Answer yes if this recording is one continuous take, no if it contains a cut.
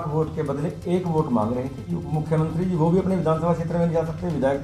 no